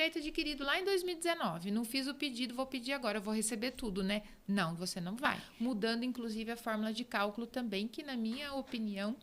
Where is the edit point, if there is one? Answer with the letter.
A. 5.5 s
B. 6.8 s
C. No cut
A